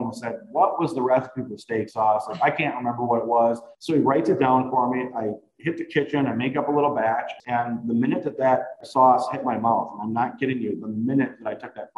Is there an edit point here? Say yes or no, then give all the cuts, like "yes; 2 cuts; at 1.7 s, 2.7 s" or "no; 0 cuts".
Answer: yes; 3 cuts; at 3.7 s, 7.4 s, 8.8 s